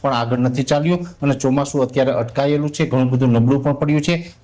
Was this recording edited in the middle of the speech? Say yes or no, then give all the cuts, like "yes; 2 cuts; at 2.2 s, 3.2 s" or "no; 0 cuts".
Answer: no; 0 cuts